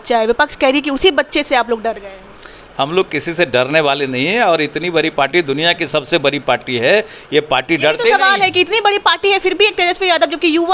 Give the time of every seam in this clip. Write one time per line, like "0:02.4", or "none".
none